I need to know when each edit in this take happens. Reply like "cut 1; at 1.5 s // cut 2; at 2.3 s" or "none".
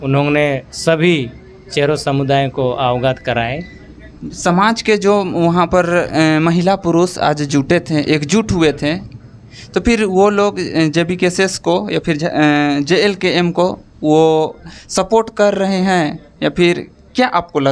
none